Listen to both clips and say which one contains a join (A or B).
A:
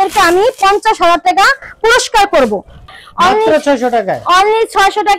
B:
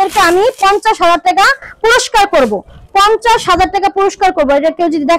A